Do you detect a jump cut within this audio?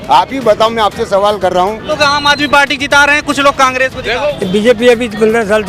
yes; 2 cuts; at 1.9 s, 4.4 s

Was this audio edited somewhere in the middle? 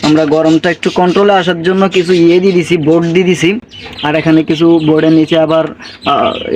no; 0 cuts

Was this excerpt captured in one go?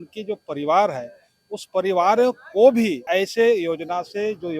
no; 1 cut; at 3.0 s

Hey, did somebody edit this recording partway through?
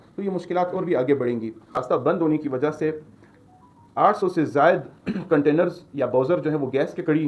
yes; 1 cut; at 1.8 s

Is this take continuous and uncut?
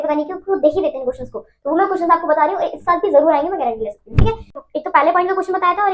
no; 1 cut; at 4.7 s

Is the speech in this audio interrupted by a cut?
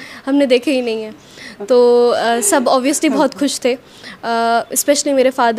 no; 0 cuts

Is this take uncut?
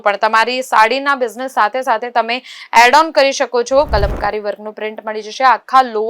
no; 1 cut; at 3.9 s

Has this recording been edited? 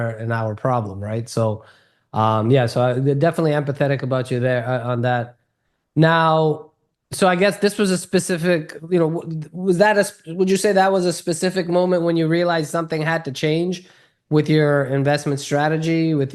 no; 0 cuts

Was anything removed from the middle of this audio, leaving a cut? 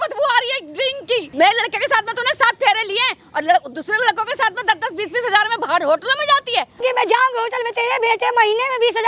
yes; 2 cuts; at 1.3 s, 6.7 s

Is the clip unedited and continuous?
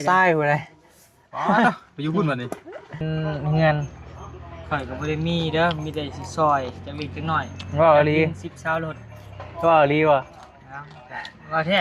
no; 1 cut; at 3.0 s

